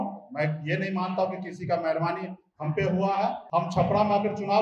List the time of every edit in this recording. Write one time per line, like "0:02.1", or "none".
0:03.4

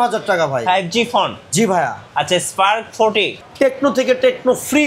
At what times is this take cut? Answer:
0:03.3

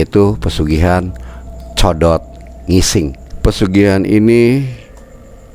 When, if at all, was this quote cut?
0:03.3

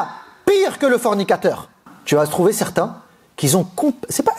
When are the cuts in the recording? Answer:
0:01.9

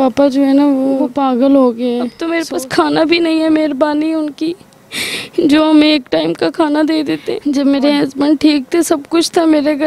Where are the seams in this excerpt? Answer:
0:01.1
0:02.2
0:07.3

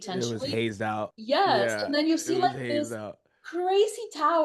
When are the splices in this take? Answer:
0:01.2

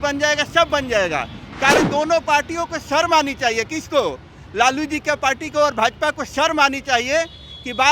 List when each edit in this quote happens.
0:01.8

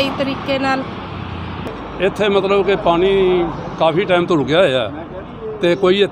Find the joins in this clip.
0:01.7

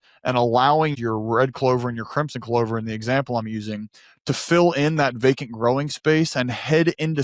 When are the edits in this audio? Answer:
0:00.9

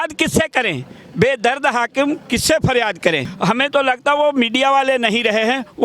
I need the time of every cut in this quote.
0:03.3

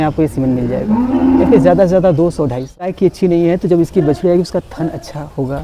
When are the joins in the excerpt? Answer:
0:03.0

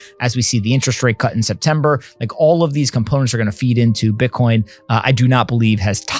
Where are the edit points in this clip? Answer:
none

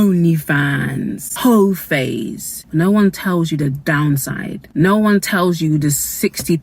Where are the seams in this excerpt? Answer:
0:03.8

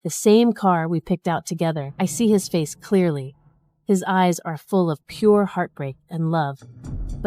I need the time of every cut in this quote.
0:01.9

